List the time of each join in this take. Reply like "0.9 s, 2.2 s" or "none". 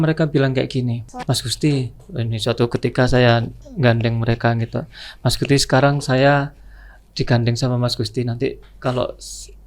1.1 s